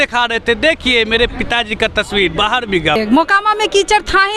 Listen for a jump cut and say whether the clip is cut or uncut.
cut